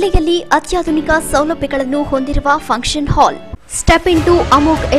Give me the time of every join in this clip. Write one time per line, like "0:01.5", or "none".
0:03.1